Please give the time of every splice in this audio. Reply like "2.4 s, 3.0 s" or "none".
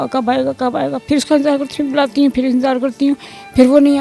none